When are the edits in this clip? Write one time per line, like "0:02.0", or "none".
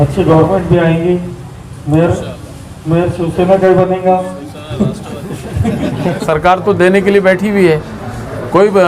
0:06.2